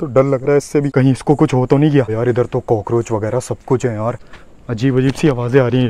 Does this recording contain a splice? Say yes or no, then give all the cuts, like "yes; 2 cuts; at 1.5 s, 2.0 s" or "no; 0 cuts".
yes; 2 cuts; at 2.1 s, 4.3 s